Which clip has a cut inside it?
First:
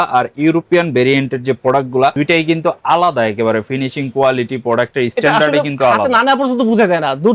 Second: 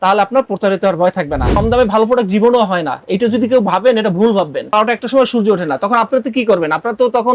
second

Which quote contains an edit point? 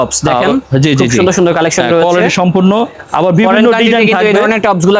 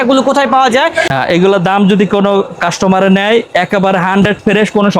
second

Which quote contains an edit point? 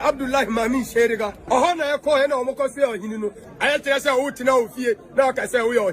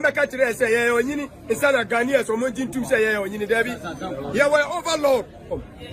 first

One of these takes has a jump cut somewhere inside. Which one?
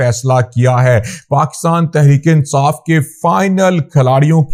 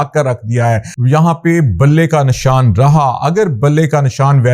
second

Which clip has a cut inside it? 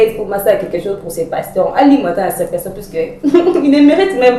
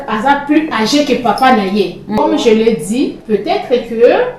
second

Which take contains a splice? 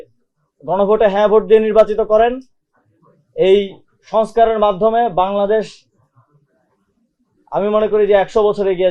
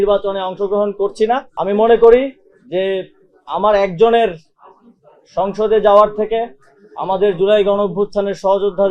second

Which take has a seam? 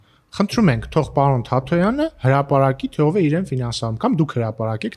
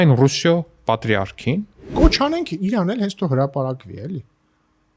second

